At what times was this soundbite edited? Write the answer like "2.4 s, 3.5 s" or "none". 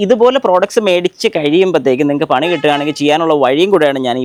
none